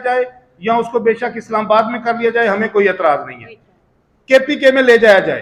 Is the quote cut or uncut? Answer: uncut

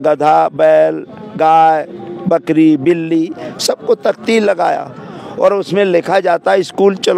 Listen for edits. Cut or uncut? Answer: uncut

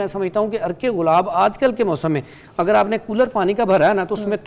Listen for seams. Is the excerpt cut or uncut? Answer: uncut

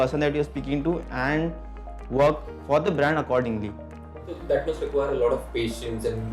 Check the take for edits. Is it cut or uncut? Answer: uncut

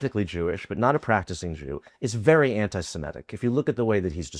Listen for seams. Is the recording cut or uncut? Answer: cut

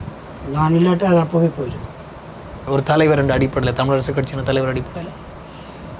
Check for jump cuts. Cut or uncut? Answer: cut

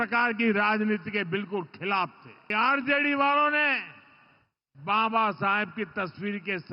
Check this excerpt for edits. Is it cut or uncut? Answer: cut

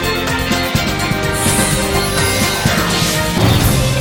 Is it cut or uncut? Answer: uncut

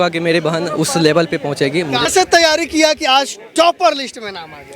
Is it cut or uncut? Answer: cut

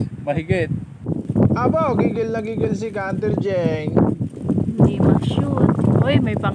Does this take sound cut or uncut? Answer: cut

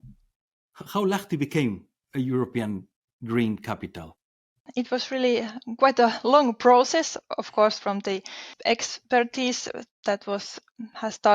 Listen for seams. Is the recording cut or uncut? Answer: cut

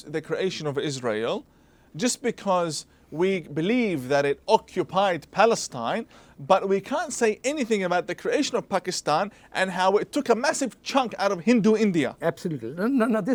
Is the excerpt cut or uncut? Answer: uncut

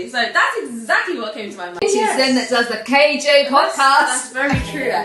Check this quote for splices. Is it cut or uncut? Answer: cut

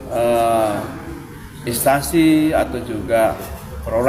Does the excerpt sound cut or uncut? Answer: uncut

